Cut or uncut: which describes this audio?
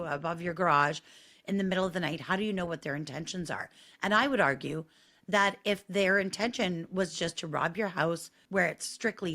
cut